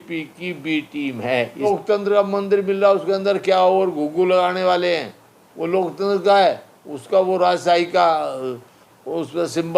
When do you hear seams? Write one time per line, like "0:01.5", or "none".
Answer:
0:01.7